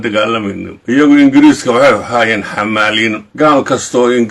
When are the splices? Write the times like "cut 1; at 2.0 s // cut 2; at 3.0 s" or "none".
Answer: cut 1; at 0.9 s // cut 2; at 3.2 s